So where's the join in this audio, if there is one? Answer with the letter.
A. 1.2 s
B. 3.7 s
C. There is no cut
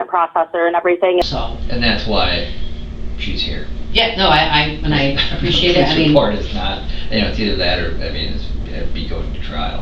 A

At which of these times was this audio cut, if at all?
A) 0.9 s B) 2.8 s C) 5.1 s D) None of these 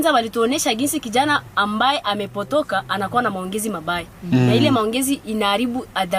D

